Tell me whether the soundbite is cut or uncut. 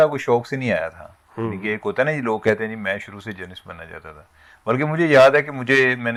uncut